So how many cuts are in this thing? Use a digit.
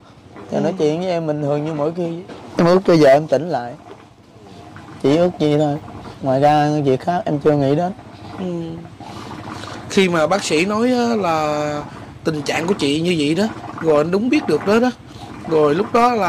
1